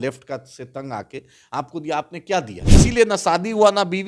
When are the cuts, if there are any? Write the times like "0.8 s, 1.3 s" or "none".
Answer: 2.8 s